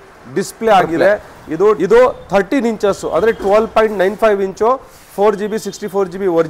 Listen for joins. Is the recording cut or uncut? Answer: cut